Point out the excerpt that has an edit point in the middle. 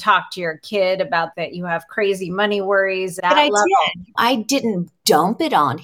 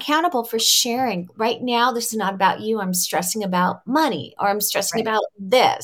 first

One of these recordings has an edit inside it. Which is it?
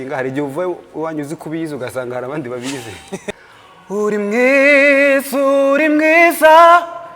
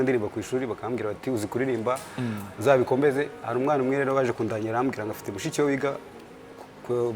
first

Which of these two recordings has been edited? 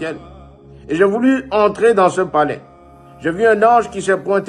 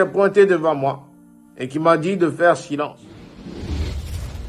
second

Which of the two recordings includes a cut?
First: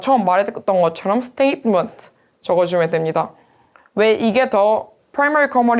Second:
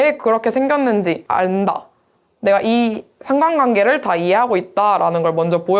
second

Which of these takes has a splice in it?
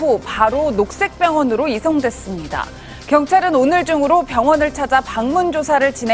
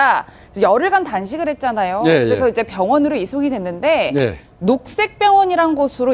first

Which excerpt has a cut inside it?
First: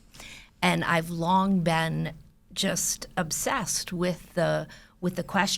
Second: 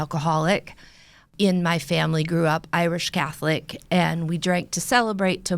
second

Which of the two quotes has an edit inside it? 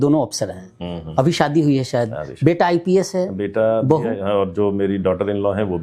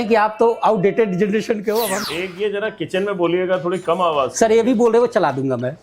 second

